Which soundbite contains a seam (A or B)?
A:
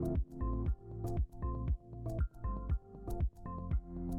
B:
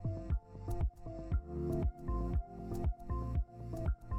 A